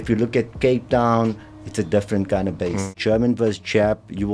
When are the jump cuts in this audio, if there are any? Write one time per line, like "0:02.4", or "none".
0:02.9